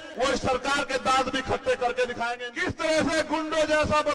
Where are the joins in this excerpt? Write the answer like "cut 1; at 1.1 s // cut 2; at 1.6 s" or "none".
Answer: cut 1; at 2.4 s